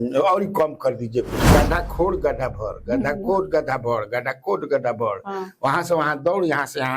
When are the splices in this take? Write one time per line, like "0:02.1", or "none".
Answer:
0:01.4